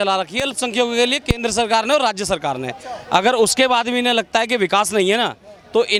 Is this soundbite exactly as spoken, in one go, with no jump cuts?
yes; 0 cuts

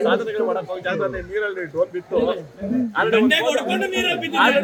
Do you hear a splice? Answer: no; 0 cuts

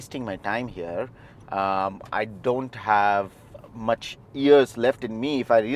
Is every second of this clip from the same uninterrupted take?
yes; 0 cuts

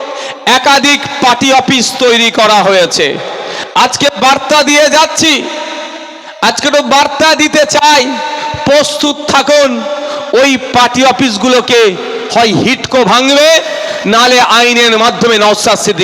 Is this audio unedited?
yes; 0 cuts

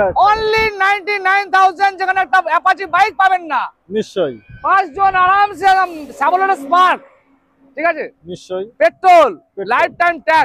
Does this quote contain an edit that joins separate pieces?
no; 0 cuts

